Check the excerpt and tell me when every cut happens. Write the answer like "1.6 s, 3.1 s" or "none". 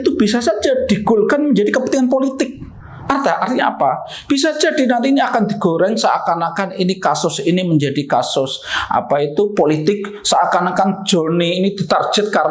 none